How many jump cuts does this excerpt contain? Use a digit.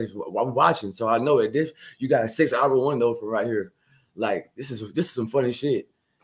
0